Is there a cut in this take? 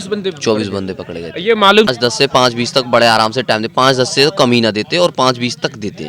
yes; 1 cut; at 1.9 s

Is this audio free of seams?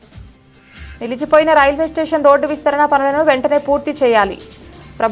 no; 1 cut; at 0.9 s

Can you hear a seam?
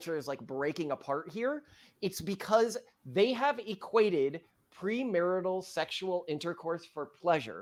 no; 0 cuts

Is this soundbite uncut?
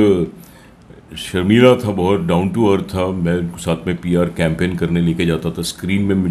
yes; 0 cuts

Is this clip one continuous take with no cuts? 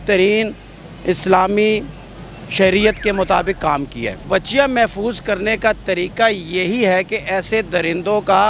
no; 1 cut; at 4.2 s

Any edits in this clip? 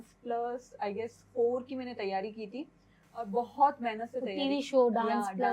no; 0 cuts

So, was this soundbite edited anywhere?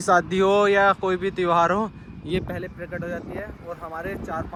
no; 0 cuts

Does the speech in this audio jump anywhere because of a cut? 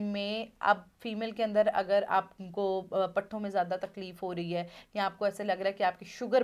no; 0 cuts

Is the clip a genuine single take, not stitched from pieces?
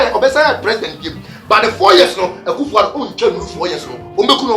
yes; 0 cuts

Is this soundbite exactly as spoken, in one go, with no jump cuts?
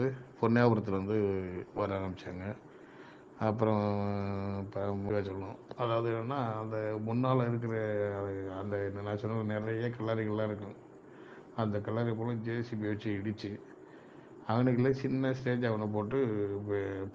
no; 1 cut; at 5.1 s

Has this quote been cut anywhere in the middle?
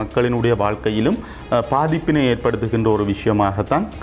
no; 0 cuts

